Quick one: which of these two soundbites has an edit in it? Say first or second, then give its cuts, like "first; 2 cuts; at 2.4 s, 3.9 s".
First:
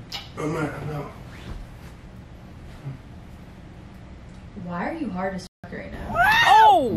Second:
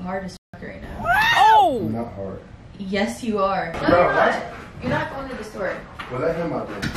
second; 1 cut; at 3.8 s